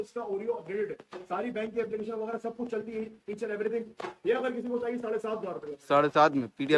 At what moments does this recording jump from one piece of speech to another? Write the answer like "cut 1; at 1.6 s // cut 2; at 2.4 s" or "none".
none